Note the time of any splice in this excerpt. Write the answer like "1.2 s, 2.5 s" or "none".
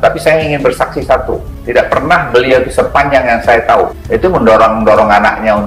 1.5 s, 4.0 s